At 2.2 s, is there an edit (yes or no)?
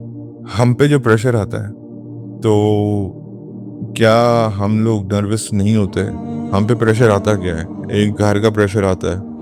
no